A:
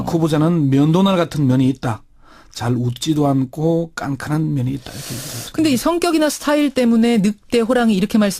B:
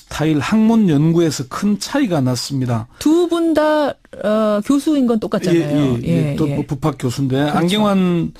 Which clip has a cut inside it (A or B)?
A